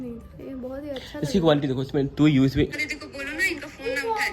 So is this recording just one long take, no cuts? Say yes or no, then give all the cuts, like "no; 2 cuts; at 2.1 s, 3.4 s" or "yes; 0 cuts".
no; 1 cut; at 2.7 s